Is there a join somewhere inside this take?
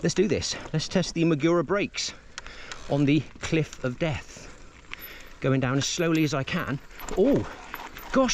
no; 0 cuts

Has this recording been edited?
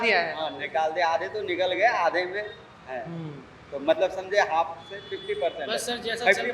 no; 0 cuts

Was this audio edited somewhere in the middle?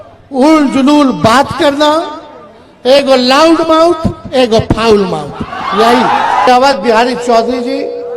yes; 1 cut; at 6.5 s

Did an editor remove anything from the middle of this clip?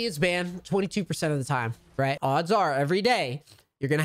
yes; 1 cut; at 2.2 s

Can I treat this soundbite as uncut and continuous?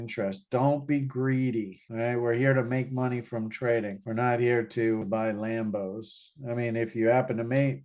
no; 1 cut; at 5.0 s

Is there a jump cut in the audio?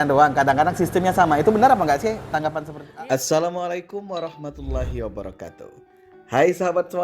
yes; 1 cut; at 2.6 s

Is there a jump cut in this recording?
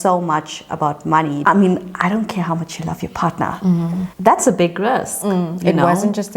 yes; 2 cuts; at 1.4 s, 4.1 s

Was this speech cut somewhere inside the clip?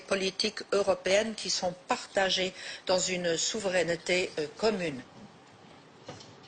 no; 0 cuts

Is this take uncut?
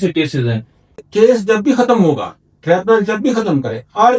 no; 1 cut; at 1.1 s

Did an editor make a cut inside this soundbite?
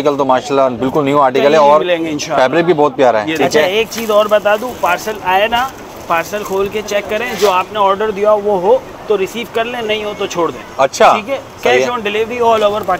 yes; 1 cut; at 3.3 s

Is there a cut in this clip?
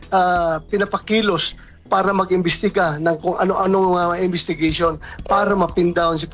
yes; 1 cut; at 1.1 s

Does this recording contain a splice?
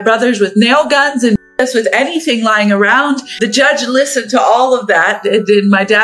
yes; 1 cut; at 3.3 s

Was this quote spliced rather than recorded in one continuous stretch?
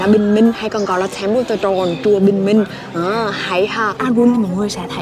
yes; 1 cut; at 4.0 s

